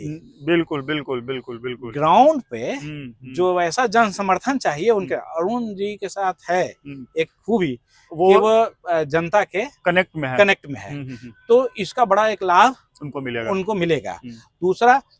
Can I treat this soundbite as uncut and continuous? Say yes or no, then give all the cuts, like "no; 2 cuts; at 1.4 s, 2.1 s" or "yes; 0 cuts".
yes; 0 cuts